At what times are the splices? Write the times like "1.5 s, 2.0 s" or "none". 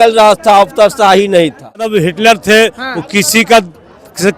1.9 s